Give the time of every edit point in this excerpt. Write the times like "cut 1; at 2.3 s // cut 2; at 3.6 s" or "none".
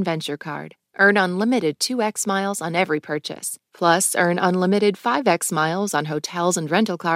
none